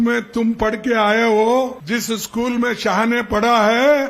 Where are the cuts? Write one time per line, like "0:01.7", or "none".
0:01.8